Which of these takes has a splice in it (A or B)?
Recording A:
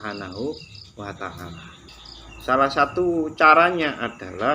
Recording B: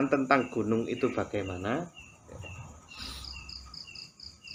A